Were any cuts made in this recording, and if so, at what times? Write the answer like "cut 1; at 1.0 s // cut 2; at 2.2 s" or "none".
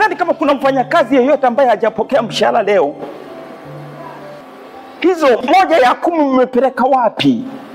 cut 1; at 5.4 s